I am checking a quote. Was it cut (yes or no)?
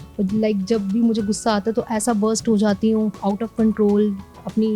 yes